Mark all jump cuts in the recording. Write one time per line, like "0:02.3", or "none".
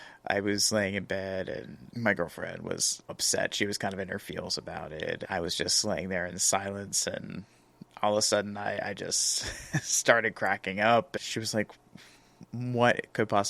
0:03.1
0:05.2
0:11.2